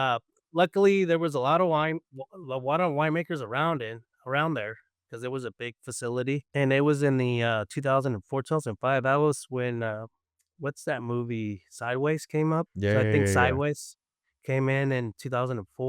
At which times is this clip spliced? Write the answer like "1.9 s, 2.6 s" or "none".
6.5 s, 12.7 s

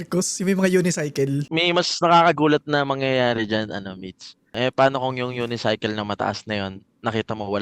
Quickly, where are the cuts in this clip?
1.4 s

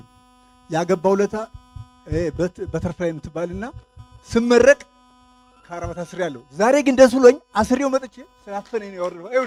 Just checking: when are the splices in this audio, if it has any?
none

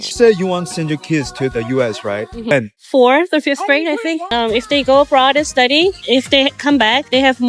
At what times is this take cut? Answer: 2.5 s, 4.3 s

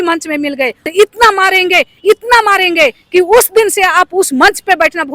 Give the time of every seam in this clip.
0.9 s

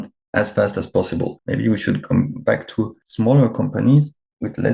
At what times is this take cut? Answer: 1.4 s, 3.0 s

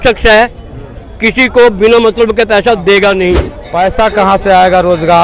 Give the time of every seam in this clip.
3.6 s

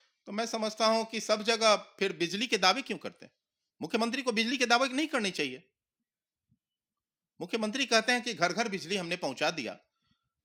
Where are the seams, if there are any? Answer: none

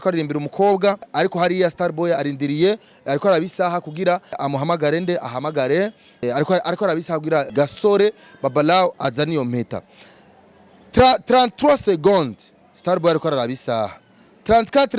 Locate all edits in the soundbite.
1.1 s, 4.4 s, 6.2 s, 7.5 s

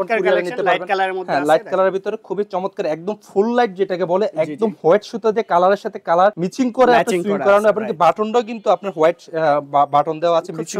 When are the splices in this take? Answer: none

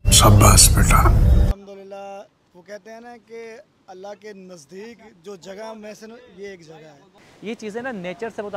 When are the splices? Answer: 1.5 s, 7.2 s

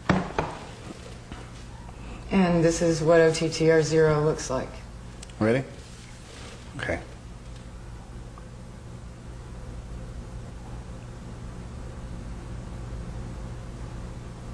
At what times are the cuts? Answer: none

